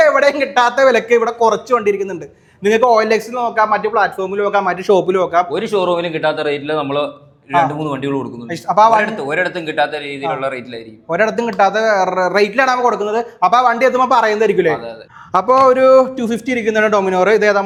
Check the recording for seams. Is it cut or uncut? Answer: uncut